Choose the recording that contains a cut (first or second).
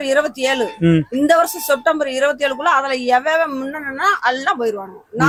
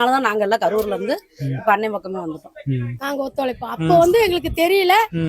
second